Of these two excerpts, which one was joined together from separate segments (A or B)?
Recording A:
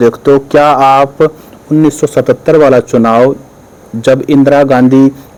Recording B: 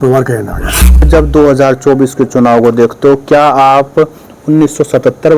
B